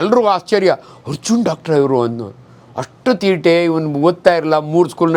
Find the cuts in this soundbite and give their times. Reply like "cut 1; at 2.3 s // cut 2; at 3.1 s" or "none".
none